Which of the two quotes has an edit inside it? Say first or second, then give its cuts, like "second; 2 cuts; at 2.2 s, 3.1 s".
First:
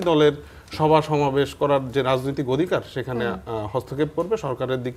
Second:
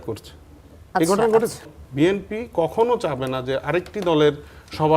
second; 1 cut; at 1.8 s